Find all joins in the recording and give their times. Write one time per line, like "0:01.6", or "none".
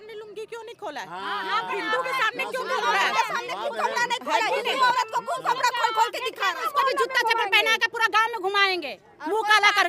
0:06.6